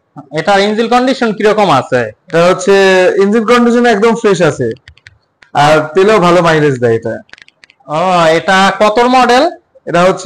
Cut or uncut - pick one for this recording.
uncut